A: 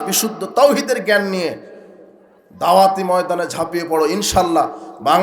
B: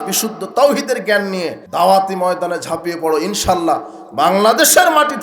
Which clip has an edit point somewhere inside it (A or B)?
B